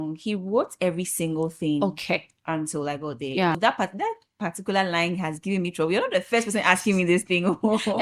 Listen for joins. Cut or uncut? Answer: cut